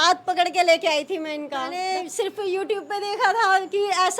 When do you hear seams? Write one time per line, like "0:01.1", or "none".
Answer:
0:01.7